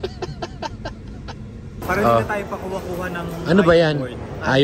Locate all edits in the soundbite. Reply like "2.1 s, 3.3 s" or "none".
1.8 s